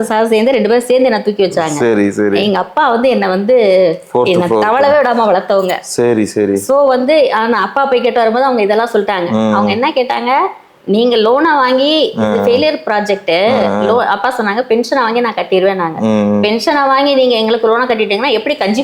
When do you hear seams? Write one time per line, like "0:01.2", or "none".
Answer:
none